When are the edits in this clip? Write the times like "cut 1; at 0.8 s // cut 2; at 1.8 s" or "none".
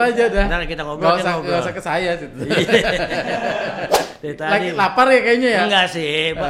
cut 1; at 4.1 s